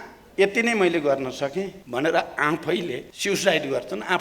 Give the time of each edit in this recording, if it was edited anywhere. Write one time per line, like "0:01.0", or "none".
0:01.8
0:03.1